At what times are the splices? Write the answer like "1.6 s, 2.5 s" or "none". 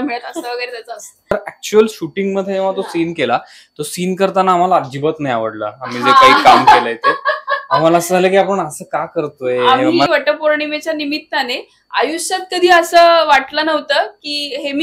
1.3 s, 10.1 s